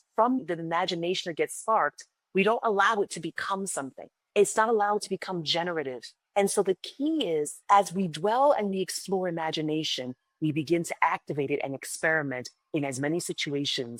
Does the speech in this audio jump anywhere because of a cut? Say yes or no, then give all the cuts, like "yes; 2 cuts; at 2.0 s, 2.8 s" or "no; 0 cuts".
no; 0 cuts